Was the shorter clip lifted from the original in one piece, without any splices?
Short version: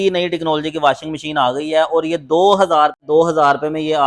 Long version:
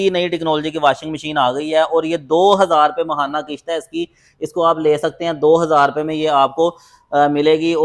no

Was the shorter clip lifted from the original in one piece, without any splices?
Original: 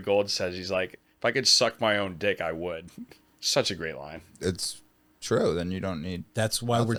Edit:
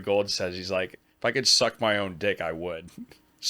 yes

